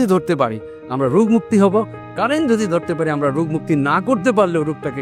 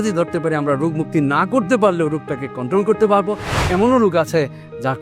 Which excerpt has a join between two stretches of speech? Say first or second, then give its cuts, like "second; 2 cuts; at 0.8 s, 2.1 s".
second; 1 cut; at 3.5 s